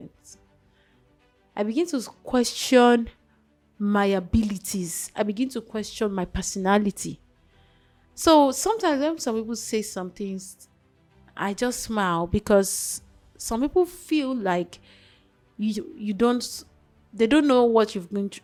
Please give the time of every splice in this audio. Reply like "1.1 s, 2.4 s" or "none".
none